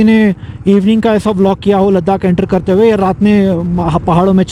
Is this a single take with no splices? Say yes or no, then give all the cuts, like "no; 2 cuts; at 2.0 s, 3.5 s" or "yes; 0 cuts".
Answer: yes; 0 cuts